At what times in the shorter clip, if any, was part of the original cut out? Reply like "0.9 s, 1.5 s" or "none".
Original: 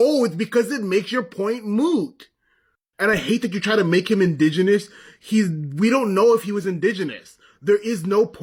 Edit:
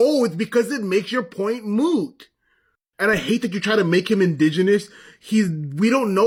none